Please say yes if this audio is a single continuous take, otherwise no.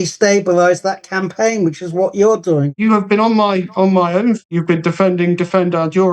no